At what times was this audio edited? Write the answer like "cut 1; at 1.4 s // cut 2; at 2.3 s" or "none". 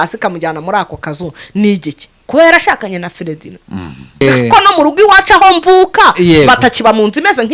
cut 1; at 4.2 s